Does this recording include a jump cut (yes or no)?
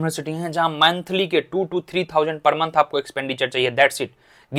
no